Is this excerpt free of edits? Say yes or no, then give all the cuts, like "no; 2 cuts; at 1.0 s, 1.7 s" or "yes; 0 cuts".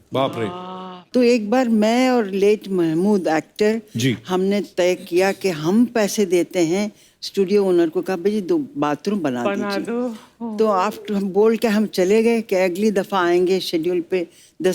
yes; 0 cuts